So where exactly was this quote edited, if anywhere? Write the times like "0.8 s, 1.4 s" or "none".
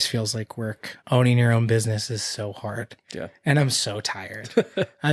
none